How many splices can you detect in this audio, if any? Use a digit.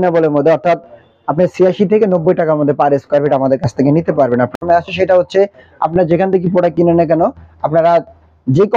1